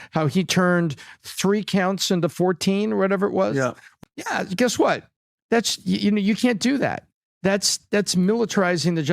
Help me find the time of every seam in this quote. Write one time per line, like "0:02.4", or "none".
0:03.8